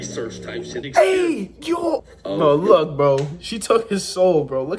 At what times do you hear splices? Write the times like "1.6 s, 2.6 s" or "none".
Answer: 0.8 s, 2.1 s